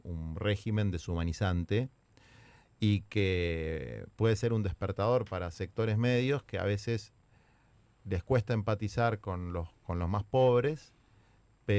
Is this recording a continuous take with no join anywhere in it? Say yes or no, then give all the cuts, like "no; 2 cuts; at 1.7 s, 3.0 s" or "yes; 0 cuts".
yes; 0 cuts